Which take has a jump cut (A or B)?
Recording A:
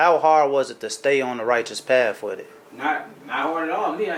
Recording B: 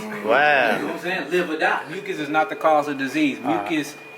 B